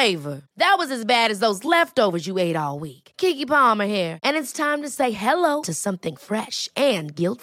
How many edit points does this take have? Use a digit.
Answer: 0